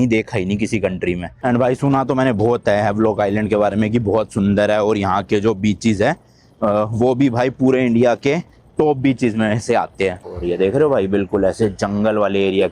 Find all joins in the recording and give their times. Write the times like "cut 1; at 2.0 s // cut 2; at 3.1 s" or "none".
cut 1; at 1.4 s // cut 2; at 10.2 s